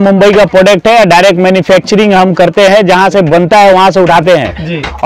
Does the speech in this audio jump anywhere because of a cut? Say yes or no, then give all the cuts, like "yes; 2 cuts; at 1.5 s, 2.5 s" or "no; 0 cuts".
no; 0 cuts